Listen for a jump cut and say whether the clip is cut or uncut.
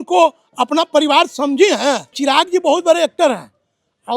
cut